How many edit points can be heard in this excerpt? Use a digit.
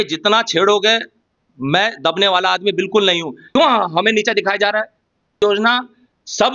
2